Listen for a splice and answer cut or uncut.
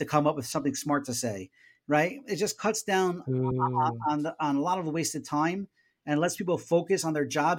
uncut